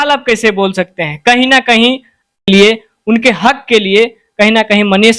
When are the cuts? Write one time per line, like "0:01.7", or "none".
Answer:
0:02.4